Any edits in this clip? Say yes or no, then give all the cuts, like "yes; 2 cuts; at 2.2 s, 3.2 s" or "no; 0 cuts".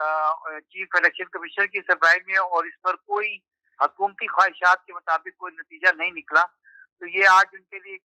no; 0 cuts